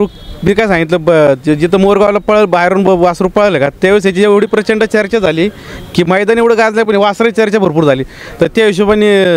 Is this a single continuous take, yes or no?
yes